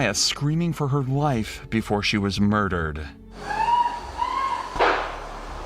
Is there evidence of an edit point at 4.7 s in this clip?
yes; 1 cut; at 4.7 s

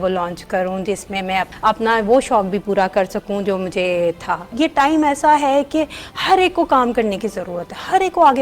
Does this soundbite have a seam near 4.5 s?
yes; 2 cuts; at 1.5 s, 4.5 s

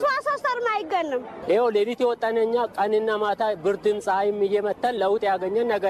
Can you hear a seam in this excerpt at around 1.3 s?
yes; 1 cut; at 1.3 s

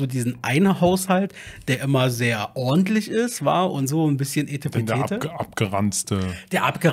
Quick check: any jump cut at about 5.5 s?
no; 0 cuts

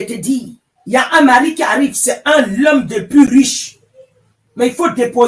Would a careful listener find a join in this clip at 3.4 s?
no; 0 cuts

